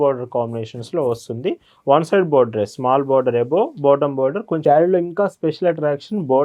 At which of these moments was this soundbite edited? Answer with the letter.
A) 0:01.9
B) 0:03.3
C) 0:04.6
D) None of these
C